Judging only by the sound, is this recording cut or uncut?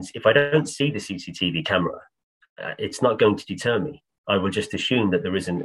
uncut